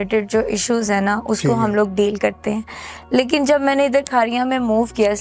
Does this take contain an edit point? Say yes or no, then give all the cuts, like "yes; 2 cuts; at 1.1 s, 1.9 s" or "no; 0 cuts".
no; 0 cuts